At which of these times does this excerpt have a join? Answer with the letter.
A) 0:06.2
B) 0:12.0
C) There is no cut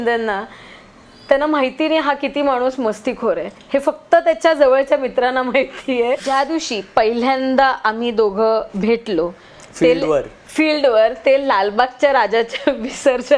A